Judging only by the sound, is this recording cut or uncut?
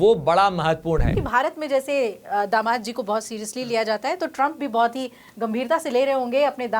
cut